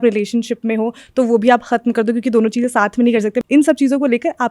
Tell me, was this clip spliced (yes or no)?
no